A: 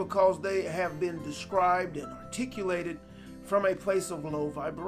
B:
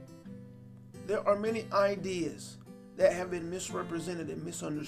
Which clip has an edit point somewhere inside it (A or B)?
B